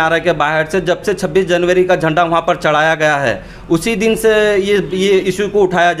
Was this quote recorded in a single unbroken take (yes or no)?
yes